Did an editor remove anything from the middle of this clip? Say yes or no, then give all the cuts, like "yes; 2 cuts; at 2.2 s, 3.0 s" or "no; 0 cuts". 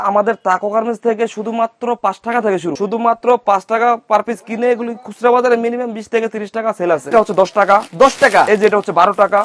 yes; 2 cuts; at 2.7 s, 7.1 s